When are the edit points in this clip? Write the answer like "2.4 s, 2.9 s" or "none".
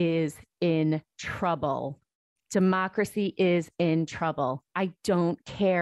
none